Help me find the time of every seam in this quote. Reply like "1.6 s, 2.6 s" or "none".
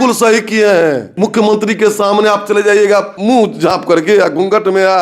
1.1 s, 3.1 s